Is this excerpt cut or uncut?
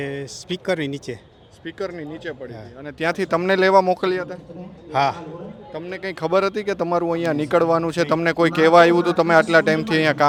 uncut